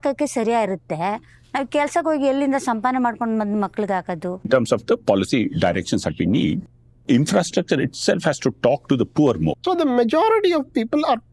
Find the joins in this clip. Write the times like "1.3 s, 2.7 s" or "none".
4.5 s, 9.6 s